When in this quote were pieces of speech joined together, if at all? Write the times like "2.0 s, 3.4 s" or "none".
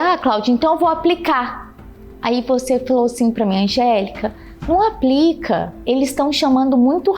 0.8 s, 5.8 s